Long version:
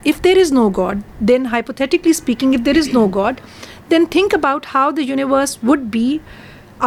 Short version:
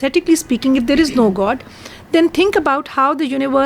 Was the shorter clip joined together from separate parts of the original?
no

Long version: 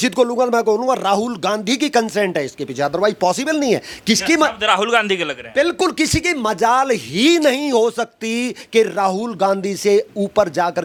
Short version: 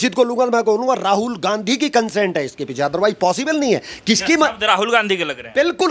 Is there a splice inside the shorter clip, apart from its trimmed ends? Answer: no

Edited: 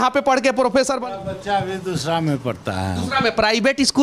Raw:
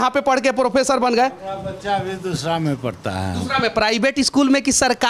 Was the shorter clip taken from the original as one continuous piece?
no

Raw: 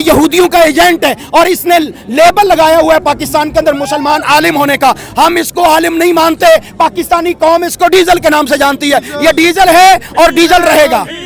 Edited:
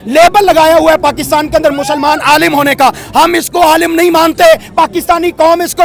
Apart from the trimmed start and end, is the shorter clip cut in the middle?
no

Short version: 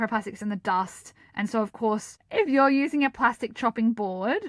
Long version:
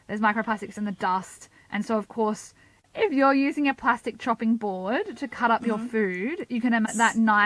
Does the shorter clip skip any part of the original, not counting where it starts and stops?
yes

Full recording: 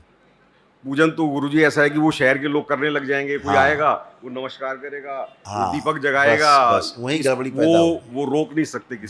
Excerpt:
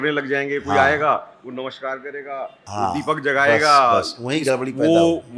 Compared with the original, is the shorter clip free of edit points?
yes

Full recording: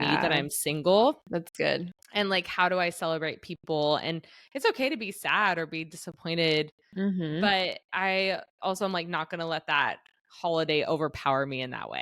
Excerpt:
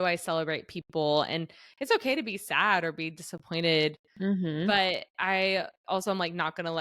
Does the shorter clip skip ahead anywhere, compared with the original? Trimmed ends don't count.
no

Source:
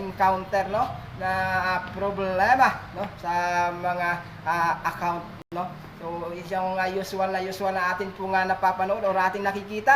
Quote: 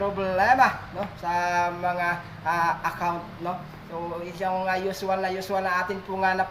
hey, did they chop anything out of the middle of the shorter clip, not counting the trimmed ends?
yes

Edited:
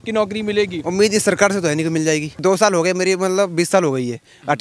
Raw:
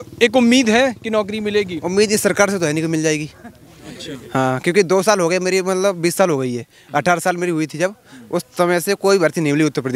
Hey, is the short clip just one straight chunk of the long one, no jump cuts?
no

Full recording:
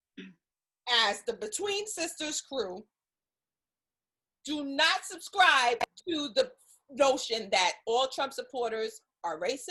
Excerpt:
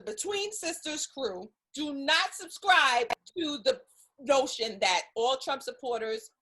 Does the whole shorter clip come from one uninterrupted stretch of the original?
no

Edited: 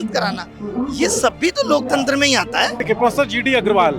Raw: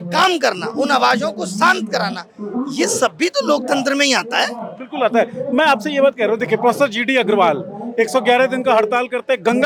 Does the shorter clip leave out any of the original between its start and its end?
yes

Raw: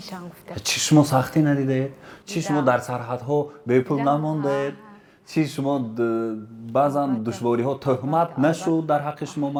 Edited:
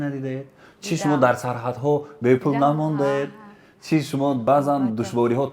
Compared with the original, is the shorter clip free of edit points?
no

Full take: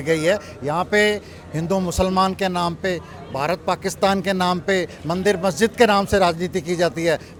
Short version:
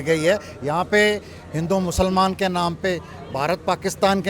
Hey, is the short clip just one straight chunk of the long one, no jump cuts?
yes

